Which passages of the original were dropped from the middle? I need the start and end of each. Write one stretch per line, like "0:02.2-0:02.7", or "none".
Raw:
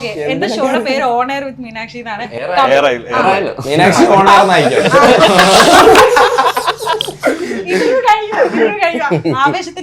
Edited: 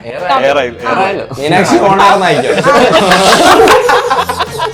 none